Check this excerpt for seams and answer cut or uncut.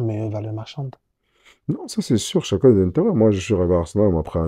uncut